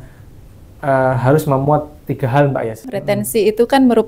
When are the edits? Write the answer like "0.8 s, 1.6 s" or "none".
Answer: 2.9 s